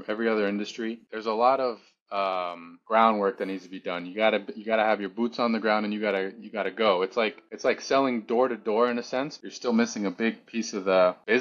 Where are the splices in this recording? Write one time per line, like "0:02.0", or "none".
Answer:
0:01.1
0:09.4